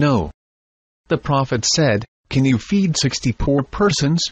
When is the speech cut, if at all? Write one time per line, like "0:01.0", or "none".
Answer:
0:02.6

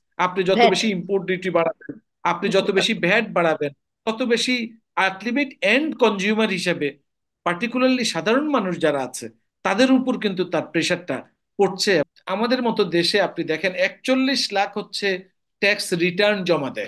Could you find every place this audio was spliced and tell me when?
0:12.1

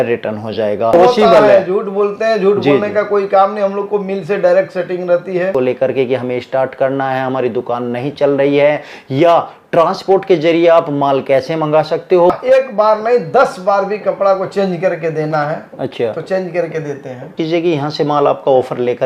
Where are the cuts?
0:00.9
0:05.5
0:12.3
0:17.3

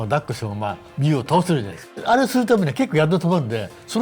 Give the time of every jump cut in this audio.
0:01.9

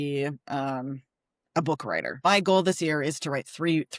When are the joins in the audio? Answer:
0:02.2

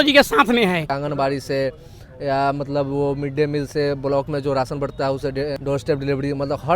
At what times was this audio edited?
0:00.9
0:05.6

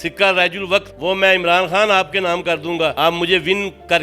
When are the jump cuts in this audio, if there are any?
0:00.9
0:02.9

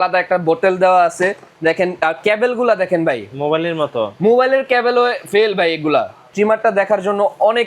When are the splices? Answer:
0:06.3

